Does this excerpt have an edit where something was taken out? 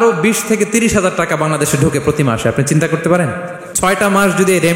yes; 1 cut; at 3.7 s

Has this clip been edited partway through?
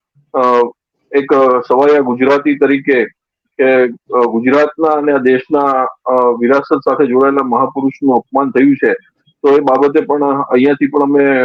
no; 0 cuts

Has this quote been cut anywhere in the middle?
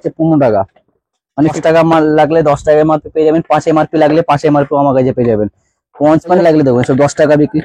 yes; 2 cuts; at 1.6 s, 6.4 s

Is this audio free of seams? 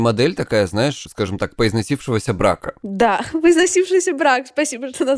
yes; 0 cuts

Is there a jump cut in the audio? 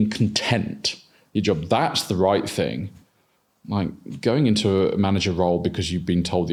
no; 0 cuts

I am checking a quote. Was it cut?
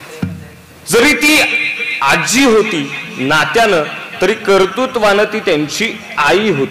no; 0 cuts

